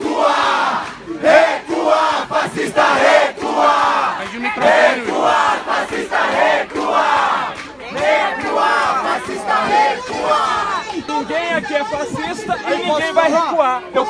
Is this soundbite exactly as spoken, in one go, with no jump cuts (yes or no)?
yes